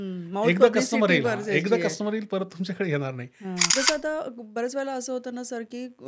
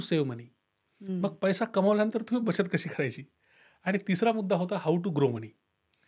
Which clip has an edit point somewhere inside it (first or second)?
first